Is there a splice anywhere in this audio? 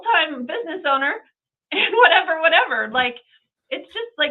no; 0 cuts

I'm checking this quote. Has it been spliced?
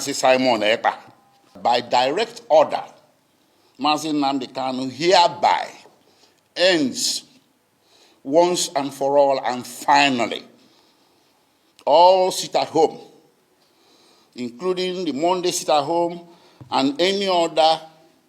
yes; 1 cut; at 1.6 s

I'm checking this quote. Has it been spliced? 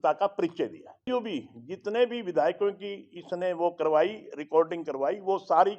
yes; 1 cut; at 1.1 s

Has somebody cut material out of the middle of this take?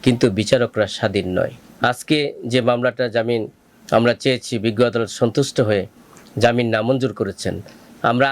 yes; 1 cut; at 1.6 s

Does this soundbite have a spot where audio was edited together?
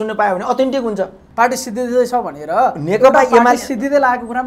yes; 1 cut; at 1.2 s

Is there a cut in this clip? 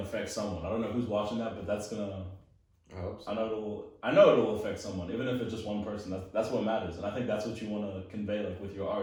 no; 0 cuts

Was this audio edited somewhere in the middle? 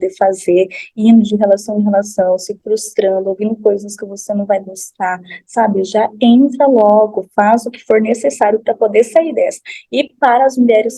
no; 0 cuts

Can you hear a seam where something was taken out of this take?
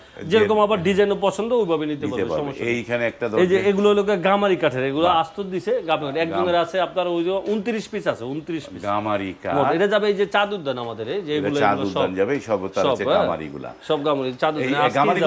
no; 0 cuts

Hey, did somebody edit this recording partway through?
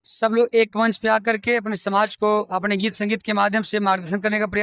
no; 0 cuts

